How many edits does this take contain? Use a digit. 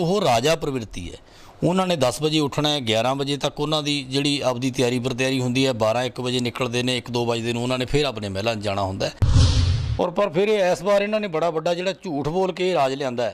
1